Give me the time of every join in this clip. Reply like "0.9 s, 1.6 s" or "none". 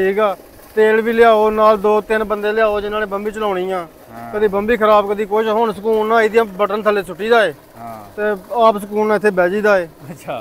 none

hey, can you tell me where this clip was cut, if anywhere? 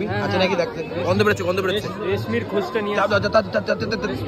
none

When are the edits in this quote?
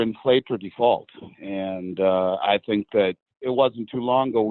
3.3 s

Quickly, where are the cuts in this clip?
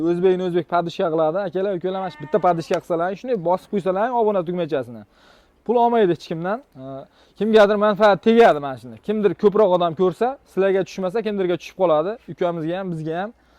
none

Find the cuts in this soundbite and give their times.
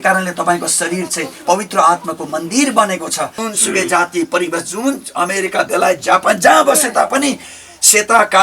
3.4 s

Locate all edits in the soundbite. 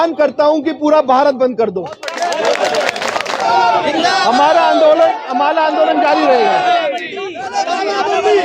3.4 s

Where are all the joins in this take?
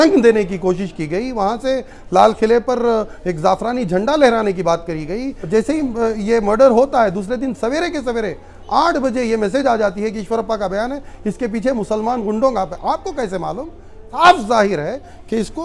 5.3 s, 14.2 s

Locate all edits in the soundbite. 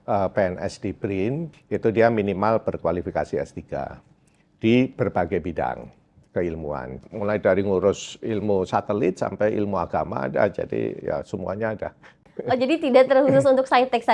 1.5 s, 7.1 s

